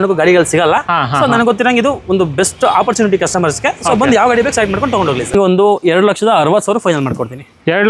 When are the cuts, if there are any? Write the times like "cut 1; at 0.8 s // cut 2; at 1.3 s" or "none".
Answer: cut 1; at 5.3 s